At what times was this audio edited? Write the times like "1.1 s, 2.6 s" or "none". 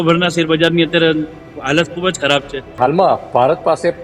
2.8 s

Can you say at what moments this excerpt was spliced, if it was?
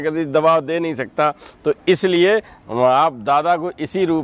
none

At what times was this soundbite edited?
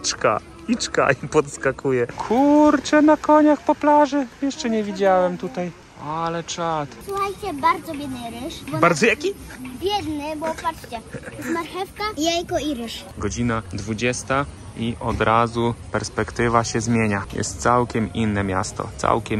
2.1 s, 5.9 s, 7.0 s, 13.1 s

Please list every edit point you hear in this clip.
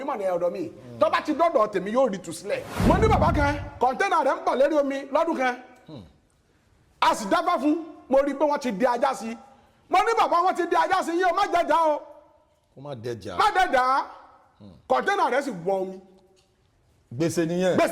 2.7 s

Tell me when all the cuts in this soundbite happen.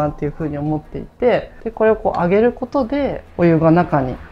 1.6 s, 3.2 s

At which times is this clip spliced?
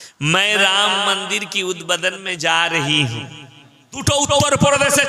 4.0 s

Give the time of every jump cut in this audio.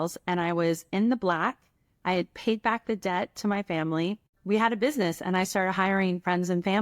4.3 s

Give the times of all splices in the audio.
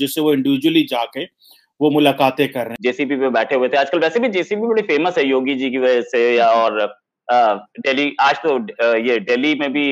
2.7 s

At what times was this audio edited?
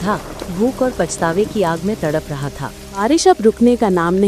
3.0 s

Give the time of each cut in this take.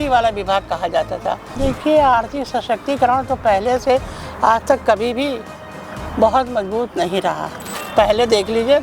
1.5 s, 7.7 s

